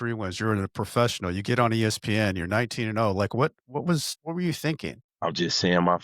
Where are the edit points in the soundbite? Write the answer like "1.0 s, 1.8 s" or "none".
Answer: 4.1 s, 5.0 s

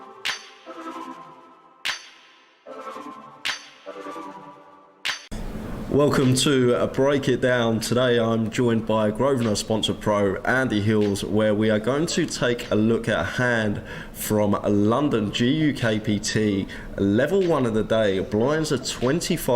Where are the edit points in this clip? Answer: 5.2 s

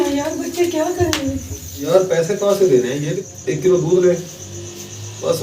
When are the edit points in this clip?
1.8 s, 2.8 s

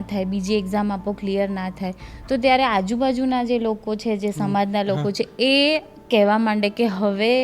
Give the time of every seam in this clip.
none

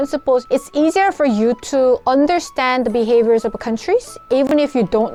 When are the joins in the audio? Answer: none

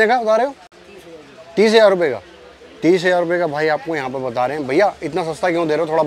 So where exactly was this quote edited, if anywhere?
none

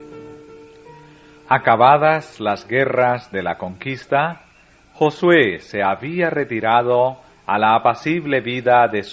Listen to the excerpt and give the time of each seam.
5.3 s

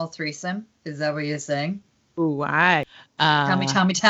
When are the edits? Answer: 2.9 s

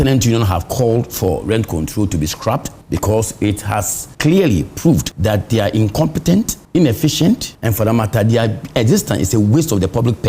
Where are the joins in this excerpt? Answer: 2.7 s, 4.0 s, 5.1 s, 6.6 s, 7.6 s

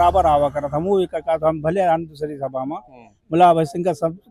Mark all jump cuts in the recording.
none

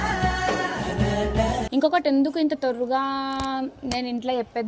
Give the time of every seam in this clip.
1.7 s

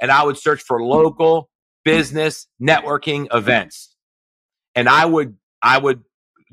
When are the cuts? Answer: none

